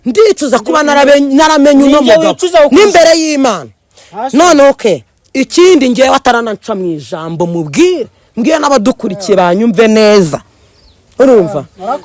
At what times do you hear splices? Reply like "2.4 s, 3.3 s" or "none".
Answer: none